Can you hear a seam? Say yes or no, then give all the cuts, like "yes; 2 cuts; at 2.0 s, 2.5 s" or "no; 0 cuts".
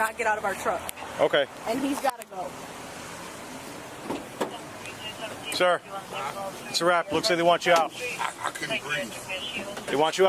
no; 0 cuts